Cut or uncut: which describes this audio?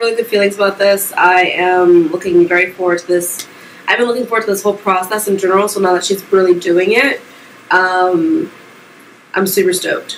uncut